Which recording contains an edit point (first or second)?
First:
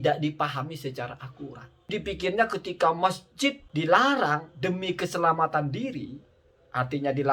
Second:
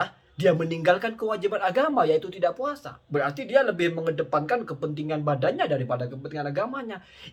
first